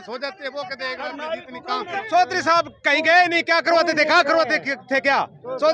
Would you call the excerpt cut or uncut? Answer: cut